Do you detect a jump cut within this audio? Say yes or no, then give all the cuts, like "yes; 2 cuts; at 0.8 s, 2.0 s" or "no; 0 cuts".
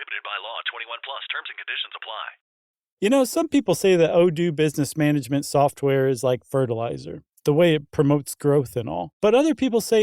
yes; 1 cut; at 2.6 s